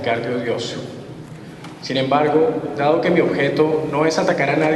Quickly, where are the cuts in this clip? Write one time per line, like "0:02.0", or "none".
none

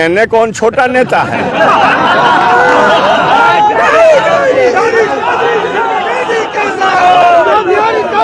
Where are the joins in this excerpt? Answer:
0:06.1

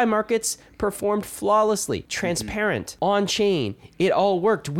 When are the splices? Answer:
0:02.5

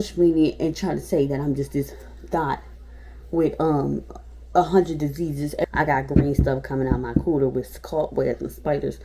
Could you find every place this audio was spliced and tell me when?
0:05.6

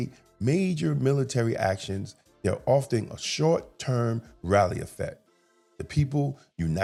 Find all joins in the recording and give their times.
none

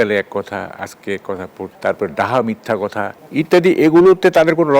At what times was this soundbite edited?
0:01.7
0:03.2

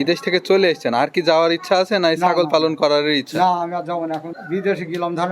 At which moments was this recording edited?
0:04.4

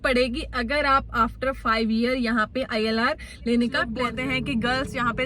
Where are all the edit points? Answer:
0:03.9

